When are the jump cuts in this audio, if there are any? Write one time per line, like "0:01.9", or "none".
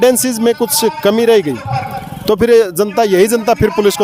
none